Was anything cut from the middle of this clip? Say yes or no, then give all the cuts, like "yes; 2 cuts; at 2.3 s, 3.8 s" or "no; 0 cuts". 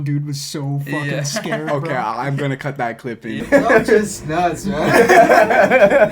yes; 1 cut; at 3.4 s